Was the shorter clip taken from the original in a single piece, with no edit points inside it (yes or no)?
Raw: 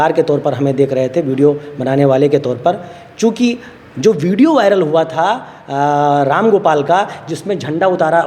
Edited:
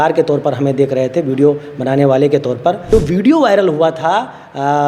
no